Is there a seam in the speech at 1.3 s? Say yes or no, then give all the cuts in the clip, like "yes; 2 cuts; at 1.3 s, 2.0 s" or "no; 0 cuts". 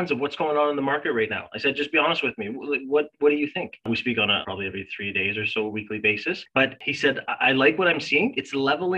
no; 2 cuts; at 4.2 s, 6.8 s